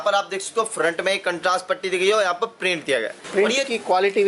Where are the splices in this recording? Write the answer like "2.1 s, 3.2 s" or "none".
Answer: 3.2 s